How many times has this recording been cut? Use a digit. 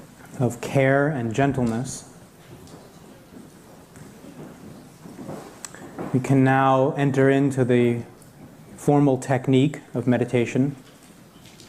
1